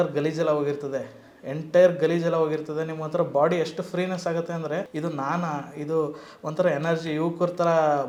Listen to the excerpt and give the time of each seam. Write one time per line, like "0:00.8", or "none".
none

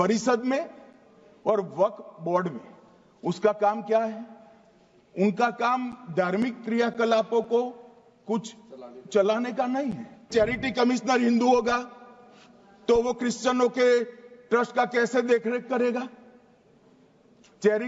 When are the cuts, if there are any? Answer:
0:10.2

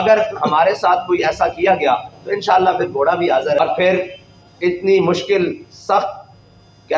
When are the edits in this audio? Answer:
0:03.6

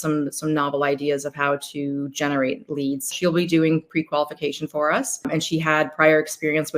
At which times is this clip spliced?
0:03.1
0:05.3

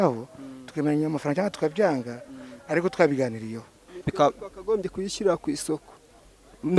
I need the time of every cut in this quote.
0:03.9

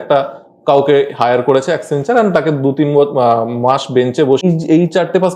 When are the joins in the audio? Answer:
0:04.4

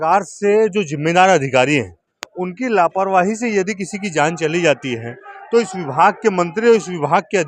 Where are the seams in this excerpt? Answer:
none

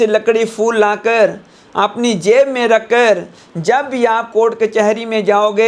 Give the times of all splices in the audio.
none

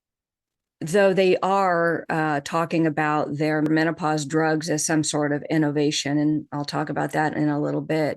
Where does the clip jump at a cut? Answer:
0:03.7

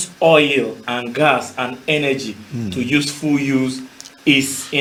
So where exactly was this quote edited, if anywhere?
none

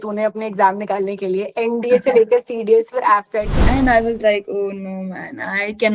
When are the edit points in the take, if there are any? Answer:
0:03.6

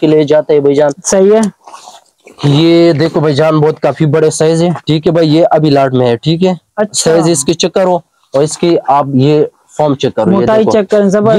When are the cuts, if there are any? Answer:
none

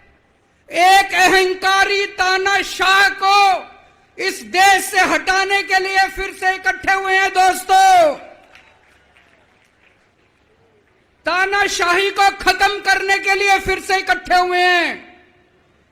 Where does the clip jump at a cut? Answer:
none

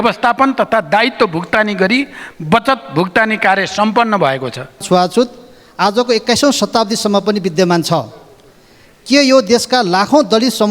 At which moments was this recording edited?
0:04.8

